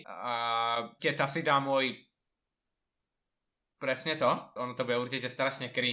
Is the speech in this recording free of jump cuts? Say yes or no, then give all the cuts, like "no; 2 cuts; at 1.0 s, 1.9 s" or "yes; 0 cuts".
no; 1 cut; at 4.6 s